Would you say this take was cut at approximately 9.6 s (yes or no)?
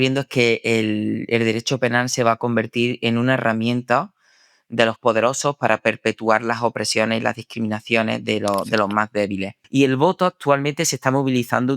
yes